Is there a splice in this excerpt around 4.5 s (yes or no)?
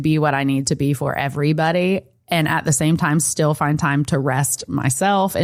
no